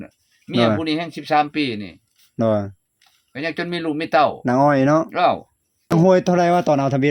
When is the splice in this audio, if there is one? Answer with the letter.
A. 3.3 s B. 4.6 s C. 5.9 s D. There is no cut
C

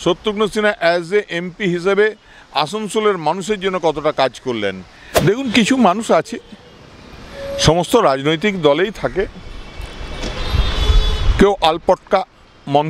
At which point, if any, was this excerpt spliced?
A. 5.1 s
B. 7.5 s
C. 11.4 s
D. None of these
A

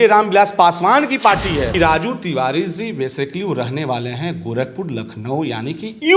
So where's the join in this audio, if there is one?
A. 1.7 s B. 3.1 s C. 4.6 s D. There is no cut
A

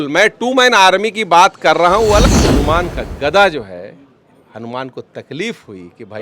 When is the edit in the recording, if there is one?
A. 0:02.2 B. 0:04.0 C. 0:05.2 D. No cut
A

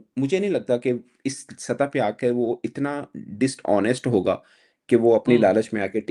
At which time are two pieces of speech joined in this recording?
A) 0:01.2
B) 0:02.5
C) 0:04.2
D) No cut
D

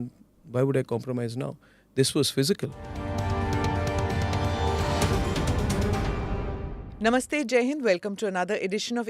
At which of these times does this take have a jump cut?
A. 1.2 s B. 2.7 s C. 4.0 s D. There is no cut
B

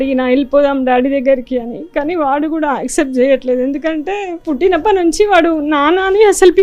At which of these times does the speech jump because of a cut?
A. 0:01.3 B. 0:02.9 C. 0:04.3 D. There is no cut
C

